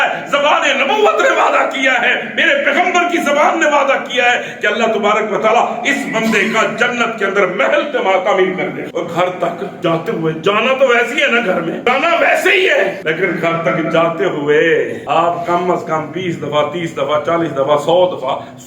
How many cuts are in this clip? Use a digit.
5